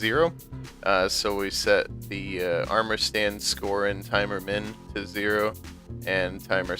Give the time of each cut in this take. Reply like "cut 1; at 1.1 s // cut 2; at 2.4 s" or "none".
cut 1; at 5.6 s